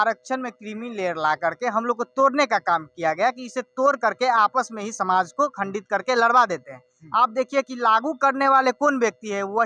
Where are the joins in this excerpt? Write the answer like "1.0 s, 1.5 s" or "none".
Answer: none